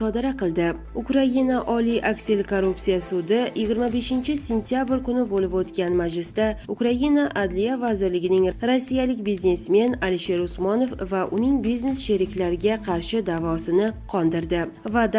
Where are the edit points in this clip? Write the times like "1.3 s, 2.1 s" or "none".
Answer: none